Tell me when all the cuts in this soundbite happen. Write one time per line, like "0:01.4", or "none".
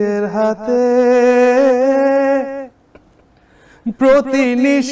none